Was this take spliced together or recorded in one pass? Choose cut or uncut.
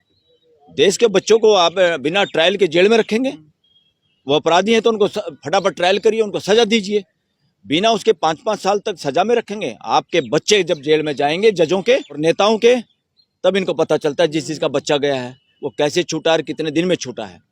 cut